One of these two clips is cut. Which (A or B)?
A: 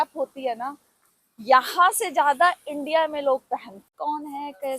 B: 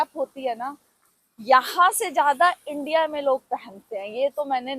A